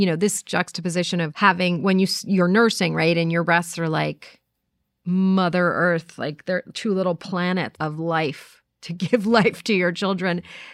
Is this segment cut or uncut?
cut